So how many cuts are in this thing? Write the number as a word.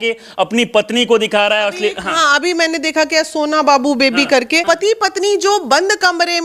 one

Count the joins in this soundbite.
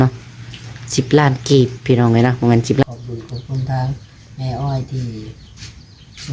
one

